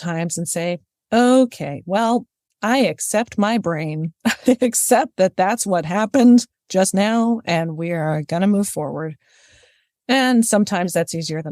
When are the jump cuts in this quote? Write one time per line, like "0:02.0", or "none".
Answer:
none